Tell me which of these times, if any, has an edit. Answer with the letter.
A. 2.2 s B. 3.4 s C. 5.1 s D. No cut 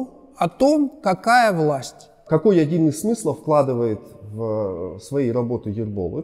A